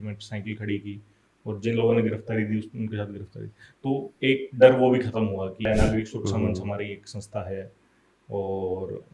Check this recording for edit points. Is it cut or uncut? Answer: cut